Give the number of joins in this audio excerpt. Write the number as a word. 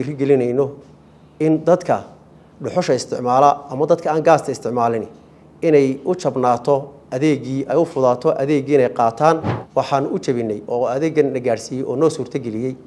one